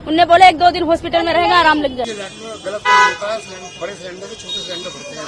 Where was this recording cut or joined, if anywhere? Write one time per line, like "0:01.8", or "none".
0:02.1